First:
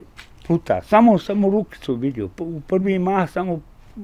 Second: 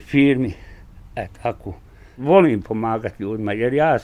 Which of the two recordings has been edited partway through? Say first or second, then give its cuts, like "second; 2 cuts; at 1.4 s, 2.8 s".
second; 1 cut; at 2.0 s